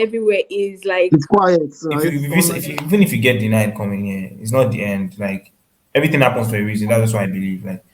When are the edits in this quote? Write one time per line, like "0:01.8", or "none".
0:02.1